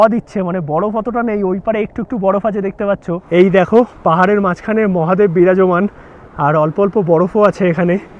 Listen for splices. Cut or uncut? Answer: cut